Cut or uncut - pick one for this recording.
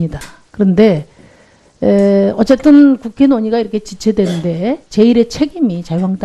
cut